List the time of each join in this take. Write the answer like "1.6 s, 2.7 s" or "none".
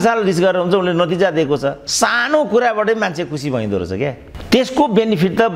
1.8 s